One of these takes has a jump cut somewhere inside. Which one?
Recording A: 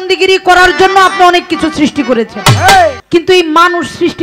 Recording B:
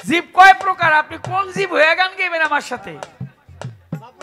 A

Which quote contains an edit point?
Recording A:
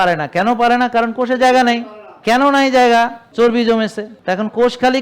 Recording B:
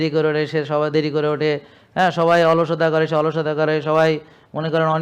A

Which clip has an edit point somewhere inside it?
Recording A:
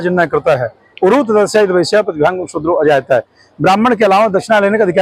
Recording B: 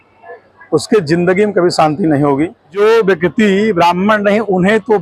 B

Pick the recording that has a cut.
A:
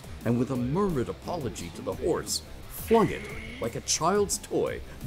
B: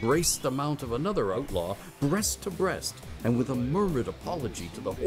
B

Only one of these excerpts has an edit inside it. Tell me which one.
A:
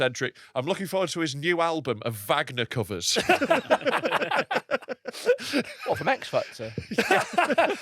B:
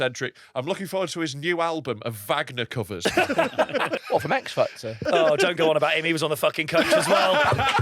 B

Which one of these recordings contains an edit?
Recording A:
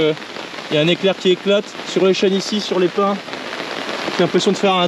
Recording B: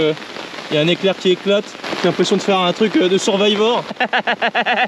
B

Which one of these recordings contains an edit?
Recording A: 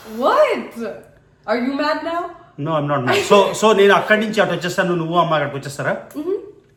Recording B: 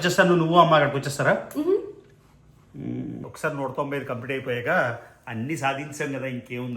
B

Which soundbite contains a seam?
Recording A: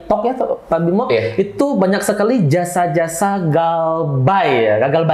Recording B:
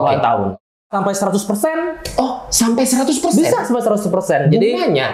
B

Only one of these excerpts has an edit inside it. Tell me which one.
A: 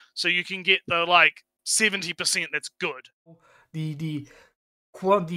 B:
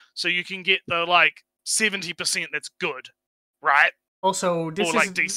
A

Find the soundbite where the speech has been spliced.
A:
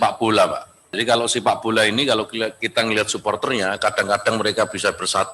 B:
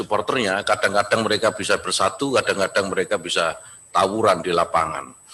A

